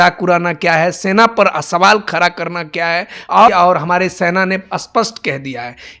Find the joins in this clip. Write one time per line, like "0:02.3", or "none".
0:03.5